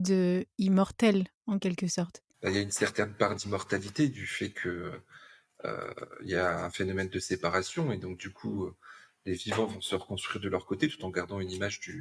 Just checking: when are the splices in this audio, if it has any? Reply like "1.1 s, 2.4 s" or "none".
none